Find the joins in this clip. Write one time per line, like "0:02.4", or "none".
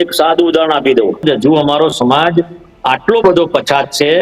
0:01.2